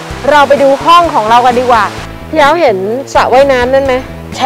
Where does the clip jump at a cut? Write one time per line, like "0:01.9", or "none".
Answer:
0:02.0

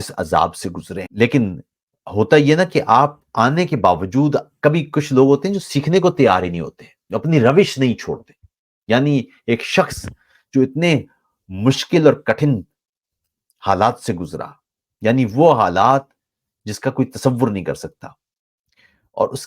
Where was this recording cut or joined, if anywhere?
0:01.0

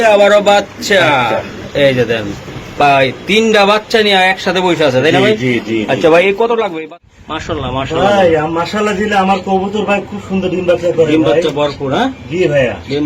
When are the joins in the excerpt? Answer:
0:06.6

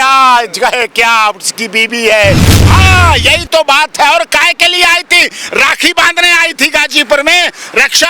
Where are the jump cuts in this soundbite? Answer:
0:02.6

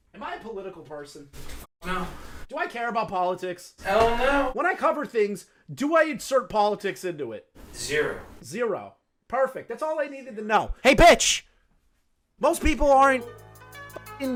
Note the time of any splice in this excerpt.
none

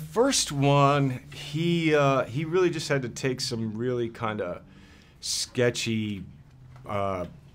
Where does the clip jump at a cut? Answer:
0:01.0

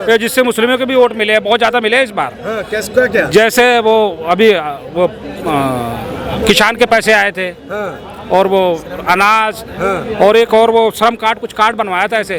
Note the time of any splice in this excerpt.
none

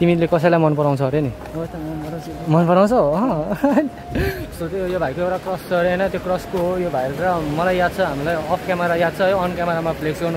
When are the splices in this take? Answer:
none

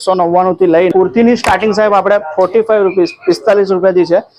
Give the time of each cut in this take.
0:00.9

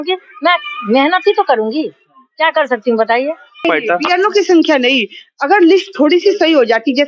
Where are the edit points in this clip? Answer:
0:03.6

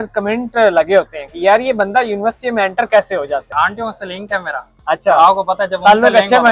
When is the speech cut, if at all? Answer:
0:03.5

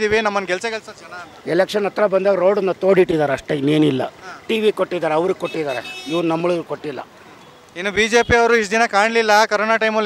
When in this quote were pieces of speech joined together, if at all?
none

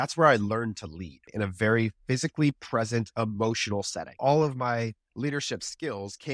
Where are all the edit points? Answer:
0:01.3
0:04.2

